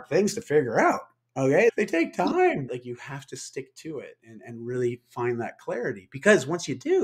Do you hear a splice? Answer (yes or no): yes